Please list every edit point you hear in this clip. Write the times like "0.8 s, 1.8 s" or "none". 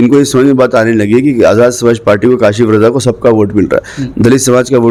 none